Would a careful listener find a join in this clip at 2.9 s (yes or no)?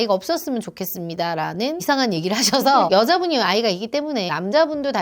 yes